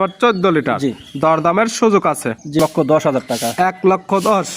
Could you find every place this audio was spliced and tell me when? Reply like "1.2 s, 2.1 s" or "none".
2.6 s